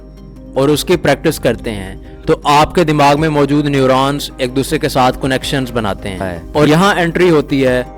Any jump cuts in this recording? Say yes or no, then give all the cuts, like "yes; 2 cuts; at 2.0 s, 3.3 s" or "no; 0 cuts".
yes; 1 cut; at 6.7 s